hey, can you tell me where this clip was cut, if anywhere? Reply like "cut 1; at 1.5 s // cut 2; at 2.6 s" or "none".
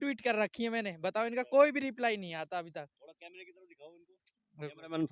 none